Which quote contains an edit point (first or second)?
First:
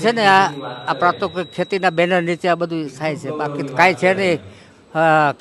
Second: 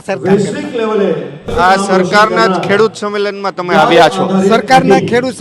second